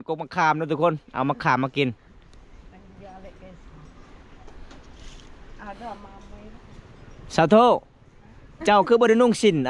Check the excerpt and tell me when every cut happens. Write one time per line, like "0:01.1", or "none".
none